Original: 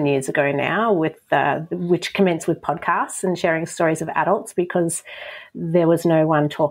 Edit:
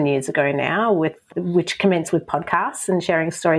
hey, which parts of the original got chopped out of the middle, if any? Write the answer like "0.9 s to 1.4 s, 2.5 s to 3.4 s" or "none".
1.2 s to 1.6 s